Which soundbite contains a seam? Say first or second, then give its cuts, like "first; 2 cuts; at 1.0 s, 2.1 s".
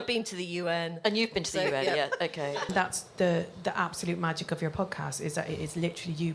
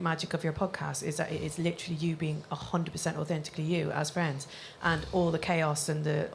first; 1 cut; at 2.7 s